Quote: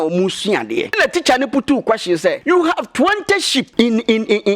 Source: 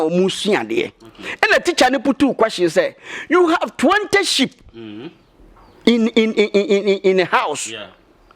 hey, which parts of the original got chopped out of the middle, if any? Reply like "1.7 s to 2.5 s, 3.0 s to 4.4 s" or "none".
0.9 s to 1.5 s, 2.9 s to 3.2 s, 4.5 s to 5.8 s